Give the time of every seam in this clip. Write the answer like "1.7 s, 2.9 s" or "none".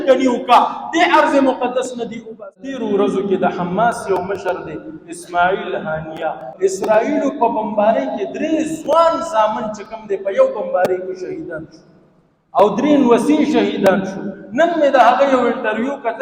2.8 s